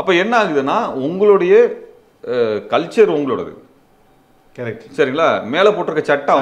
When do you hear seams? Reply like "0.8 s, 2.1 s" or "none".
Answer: none